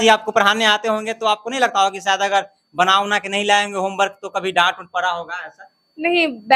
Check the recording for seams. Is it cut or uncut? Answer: uncut